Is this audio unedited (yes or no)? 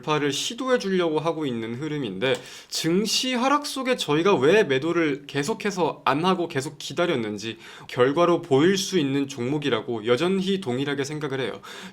no